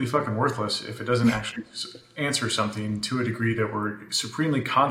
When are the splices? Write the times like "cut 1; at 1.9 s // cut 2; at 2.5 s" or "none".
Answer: none